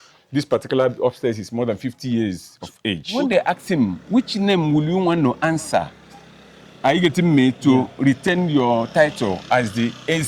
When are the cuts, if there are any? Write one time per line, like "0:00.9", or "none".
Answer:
0:03.1